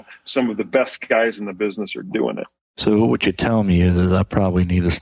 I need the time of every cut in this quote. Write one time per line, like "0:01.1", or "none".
0:02.7